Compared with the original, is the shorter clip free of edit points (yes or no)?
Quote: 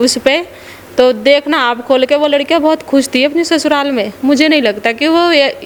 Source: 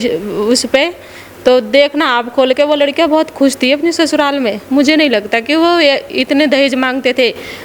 yes